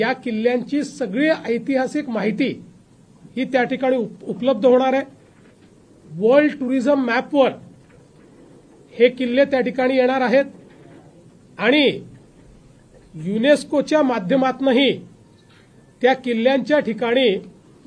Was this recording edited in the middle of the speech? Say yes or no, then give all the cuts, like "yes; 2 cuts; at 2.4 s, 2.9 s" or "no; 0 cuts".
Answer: no; 0 cuts